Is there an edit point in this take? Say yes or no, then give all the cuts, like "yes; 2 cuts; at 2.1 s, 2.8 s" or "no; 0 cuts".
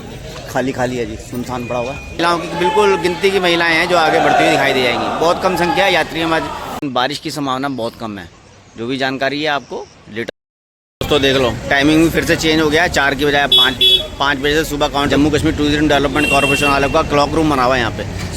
yes; 4 cuts; at 2.2 s, 6.8 s, 10.3 s, 15.1 s